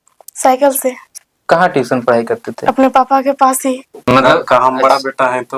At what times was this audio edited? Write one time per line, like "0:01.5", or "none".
0:01.1
0:04.1